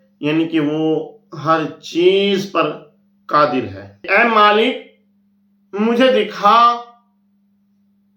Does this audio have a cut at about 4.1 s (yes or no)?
yes